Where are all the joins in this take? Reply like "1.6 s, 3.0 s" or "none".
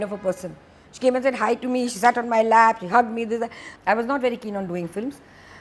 3.7 s